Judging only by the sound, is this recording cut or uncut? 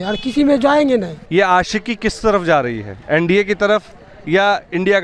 cut